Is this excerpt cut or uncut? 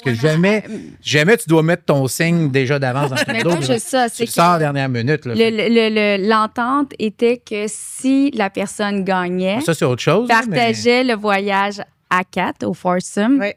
uncut